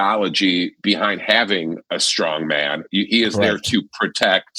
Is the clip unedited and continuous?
yes; 0 cuts

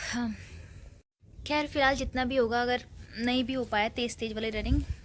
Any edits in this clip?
no; 0 cuts

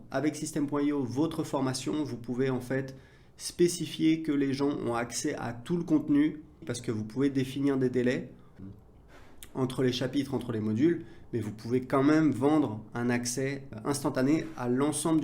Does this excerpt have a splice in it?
yes; 3 cuts; at 6.7 s, 8.5 s, 13.7 s

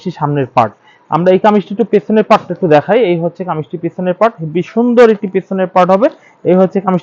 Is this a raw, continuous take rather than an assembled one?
yes; 0 cuts

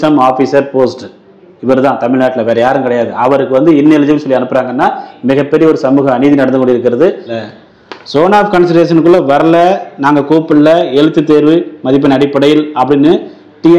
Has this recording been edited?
yes; 1 cut; at 7.3 s

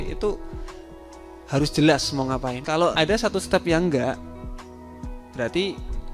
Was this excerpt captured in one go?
no; 1 cut; at 2.9 s

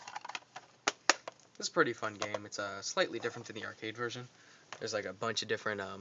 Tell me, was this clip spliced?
yes; 1 cut; at 1.3 s

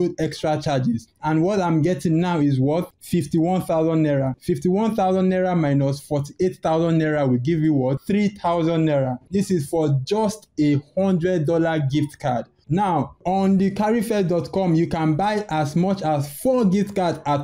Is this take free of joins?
yes; 0 cuts

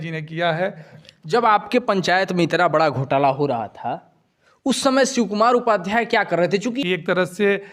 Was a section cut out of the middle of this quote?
yes; 2 cuts; at 0.9 s, 6.8 s

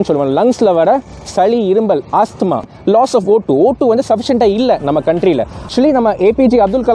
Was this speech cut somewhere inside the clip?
yes; 2 cuts; at 2.7 s, 5.6 s

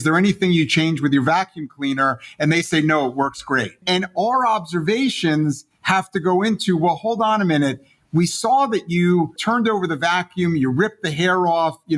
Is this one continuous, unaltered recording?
no; 2 cuts; at 3.8 s, 9.4 s

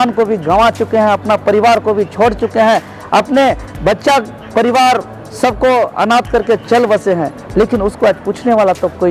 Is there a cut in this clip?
no; 0 cuts

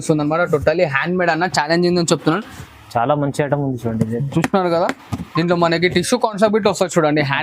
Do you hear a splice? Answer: yes; 1 cut; at 2.6 s

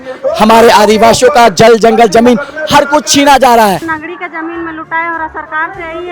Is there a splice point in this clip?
yes; 1 cut; at 3.8 s

